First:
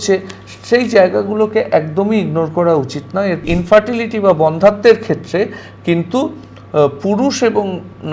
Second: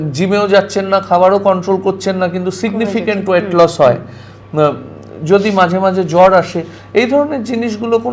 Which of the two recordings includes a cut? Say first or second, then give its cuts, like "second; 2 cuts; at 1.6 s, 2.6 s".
first; 1 cut; at 3.4 s